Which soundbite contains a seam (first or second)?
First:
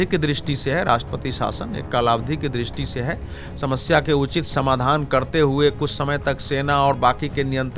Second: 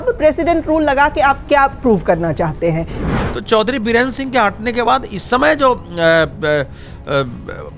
second